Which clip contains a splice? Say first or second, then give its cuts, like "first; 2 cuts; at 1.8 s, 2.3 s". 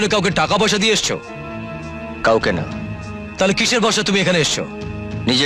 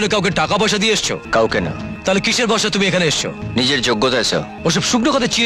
second; 4 cuts; at 1.2 s, 1.9 s, 3.4 s, 4.5 s